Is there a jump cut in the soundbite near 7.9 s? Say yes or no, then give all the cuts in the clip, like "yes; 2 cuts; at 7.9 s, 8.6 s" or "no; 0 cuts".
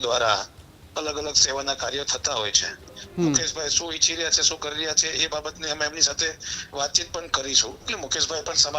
yes; 1 cut; at 7.9 s